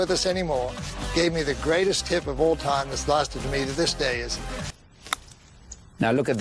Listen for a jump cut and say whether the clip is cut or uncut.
cut